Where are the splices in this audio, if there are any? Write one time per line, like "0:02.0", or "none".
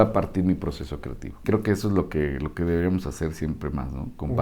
0:01.4